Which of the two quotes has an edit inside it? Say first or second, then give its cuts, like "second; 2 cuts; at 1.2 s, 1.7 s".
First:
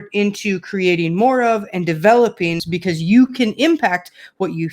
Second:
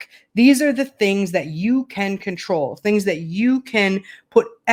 first; 1 cut; at 2.7 s